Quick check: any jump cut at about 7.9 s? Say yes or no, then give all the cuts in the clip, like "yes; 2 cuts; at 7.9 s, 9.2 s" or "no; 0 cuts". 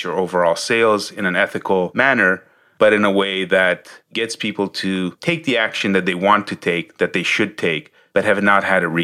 yes; 1 cut; at 7.9 s